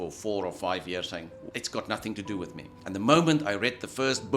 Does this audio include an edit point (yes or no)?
yes